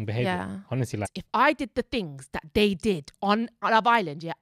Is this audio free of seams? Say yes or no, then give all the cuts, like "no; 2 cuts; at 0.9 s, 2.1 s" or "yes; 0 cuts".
no; 1 cut; at 1.1 s